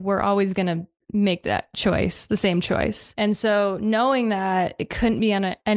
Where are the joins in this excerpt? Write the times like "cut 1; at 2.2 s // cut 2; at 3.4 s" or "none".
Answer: cut 1; at 3.0 s